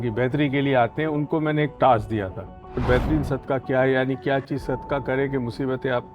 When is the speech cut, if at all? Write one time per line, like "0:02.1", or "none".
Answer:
0:02.8